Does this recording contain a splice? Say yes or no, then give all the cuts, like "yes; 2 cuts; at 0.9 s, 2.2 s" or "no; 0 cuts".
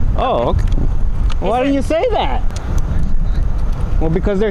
no; 0 cuts